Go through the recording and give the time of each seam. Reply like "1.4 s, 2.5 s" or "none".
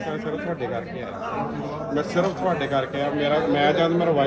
none

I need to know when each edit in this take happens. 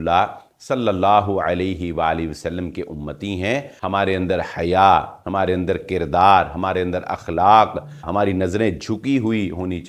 3.7 s, 8.1 s

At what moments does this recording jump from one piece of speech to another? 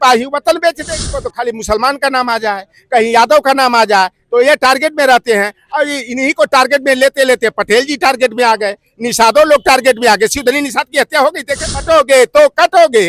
1.0 s, 11.8 s

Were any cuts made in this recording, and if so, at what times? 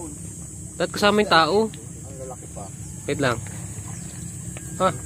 none

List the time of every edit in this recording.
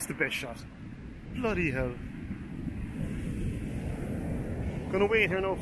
none

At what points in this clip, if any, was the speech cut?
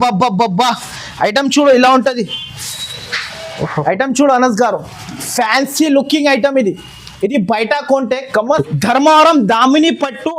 8.7 s

